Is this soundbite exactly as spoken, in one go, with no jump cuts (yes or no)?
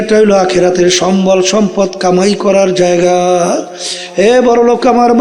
yes